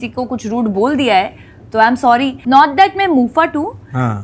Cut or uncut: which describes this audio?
cut